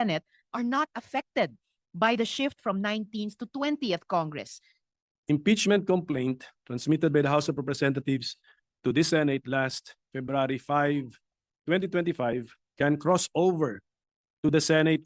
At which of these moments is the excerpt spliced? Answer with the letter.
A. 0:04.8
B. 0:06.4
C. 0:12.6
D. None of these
A